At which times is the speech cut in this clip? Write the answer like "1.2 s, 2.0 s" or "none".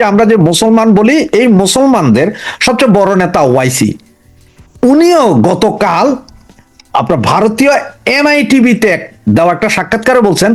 none